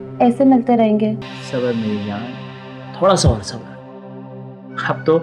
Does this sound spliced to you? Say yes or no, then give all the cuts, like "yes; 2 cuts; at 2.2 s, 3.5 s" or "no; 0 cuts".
yes; 1 cut; at 1.3 s